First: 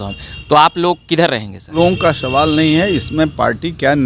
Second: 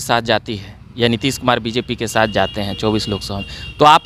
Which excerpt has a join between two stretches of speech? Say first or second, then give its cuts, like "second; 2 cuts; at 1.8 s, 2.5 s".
first; 1 cut; at 1.7 s